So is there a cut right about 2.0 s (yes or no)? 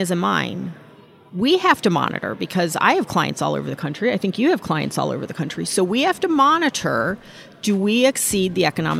no